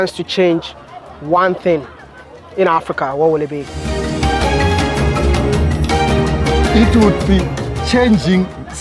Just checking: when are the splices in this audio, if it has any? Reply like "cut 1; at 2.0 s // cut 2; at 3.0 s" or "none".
none